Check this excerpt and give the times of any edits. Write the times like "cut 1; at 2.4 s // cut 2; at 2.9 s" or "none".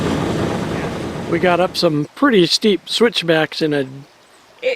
cut 1; at 1.0 s

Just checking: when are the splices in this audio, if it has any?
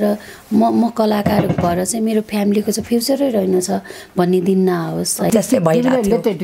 cut 1; at 5.3 s

